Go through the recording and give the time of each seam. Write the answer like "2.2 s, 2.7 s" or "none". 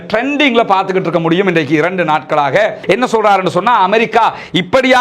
2.8 s